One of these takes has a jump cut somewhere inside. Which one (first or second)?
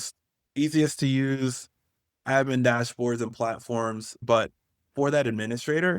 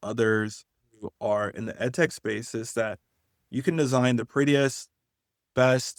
first